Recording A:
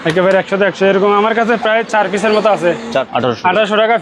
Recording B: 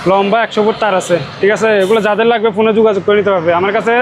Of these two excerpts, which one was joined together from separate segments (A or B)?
A